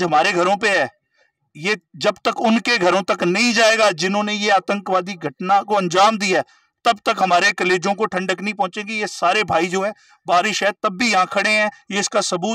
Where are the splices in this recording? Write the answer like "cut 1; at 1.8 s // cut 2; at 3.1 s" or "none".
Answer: none